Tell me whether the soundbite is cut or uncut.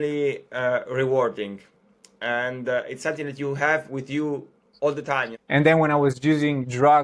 cut